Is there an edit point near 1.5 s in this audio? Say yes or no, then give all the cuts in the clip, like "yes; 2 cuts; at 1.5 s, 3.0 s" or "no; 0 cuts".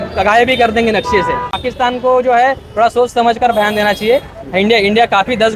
yes; 1 cut; at 1.5 s